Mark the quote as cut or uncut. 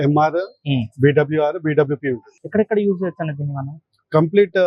cut